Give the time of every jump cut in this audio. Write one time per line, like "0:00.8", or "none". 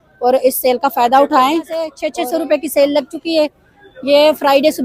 0:02.0